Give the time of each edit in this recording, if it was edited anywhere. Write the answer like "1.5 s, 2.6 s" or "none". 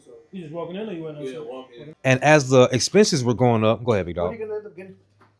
1.9 s